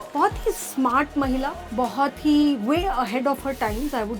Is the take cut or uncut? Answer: cut